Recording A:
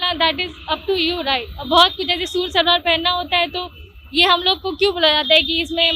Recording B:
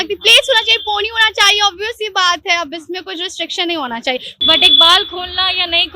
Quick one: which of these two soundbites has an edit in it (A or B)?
B